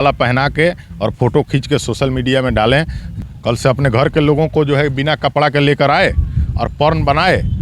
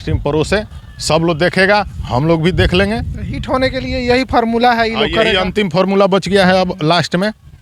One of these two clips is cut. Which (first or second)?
first